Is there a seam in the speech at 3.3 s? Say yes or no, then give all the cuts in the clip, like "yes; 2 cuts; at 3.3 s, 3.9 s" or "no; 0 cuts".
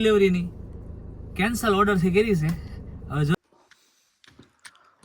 yes; 1 cut; at 3.3 s